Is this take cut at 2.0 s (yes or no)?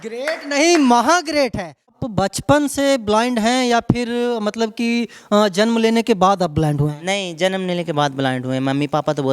yes